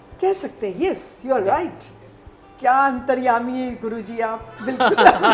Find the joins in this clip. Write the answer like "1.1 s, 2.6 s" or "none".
none